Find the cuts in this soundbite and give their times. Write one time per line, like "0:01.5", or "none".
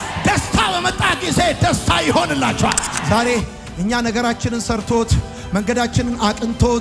0:02.9